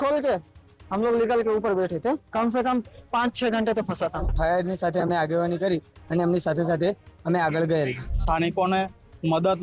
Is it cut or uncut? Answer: cut